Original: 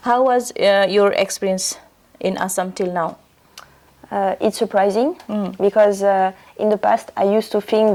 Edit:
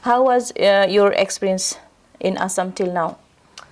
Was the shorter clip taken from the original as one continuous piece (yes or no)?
yes